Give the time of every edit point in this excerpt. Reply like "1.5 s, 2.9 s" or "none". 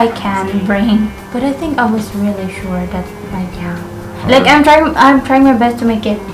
1.1 s